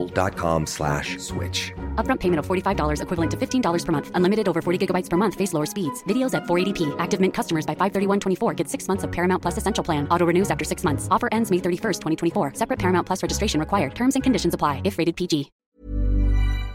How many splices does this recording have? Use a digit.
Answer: 1